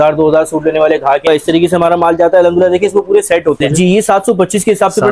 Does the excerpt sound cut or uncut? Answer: cut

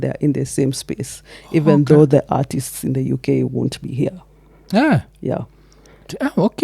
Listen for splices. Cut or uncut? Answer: uncut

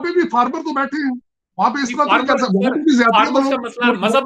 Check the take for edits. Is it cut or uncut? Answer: uncut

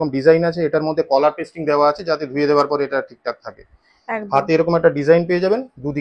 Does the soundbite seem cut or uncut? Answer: uncut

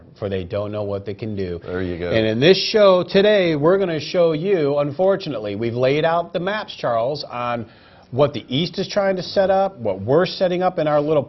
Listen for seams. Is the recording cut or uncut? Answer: uncut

